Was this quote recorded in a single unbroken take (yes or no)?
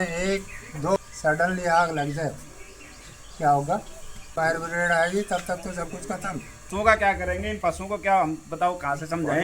no